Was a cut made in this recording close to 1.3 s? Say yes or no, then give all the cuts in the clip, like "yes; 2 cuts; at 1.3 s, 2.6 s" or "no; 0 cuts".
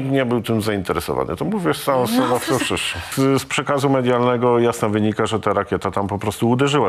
no; 1 cut; at 3.1 s